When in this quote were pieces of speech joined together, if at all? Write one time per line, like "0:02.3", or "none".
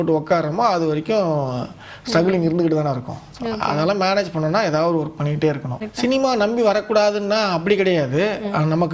0:05.8